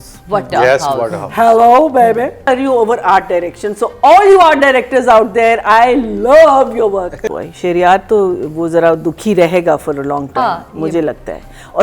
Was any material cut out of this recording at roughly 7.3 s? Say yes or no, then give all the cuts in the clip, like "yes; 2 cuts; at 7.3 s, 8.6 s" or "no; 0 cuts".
yes; 2 cuts; at 2.4 s, 7.3 s